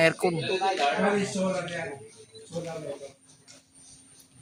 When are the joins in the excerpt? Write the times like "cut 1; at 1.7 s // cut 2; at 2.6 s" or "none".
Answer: none